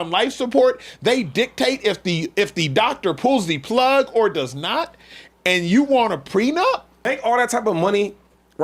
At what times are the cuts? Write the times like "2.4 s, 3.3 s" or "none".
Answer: 7.1 s